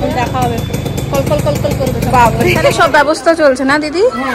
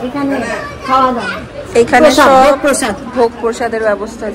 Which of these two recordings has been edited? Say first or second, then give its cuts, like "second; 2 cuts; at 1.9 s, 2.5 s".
first; 1 cut; at 2.8 s